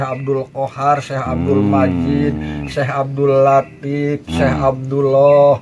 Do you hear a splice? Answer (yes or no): no